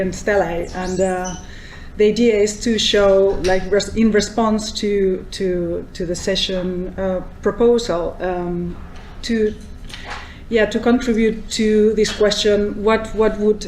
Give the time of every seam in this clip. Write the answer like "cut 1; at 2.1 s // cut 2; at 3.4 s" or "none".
cut 1; at 11.9 s